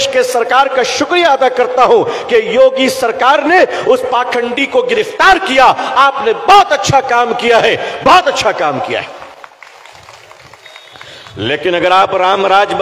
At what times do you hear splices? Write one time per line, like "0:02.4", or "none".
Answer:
0:09.6